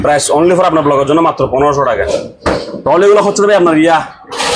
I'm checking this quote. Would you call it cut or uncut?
cut